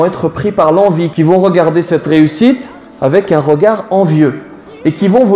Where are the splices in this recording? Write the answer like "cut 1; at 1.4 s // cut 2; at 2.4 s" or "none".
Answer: none